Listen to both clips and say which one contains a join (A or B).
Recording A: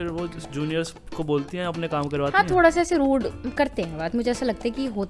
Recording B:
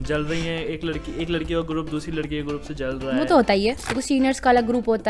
B